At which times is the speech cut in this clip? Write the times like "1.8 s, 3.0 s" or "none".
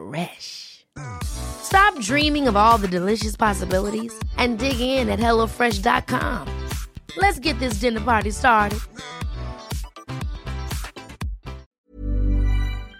11.6 s